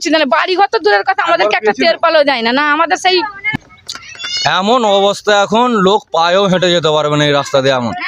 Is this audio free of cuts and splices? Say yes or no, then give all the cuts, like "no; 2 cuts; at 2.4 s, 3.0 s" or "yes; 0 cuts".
no; 1 cut; at 3.4 s